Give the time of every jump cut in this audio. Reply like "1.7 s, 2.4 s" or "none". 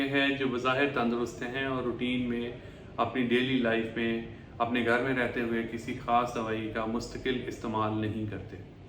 none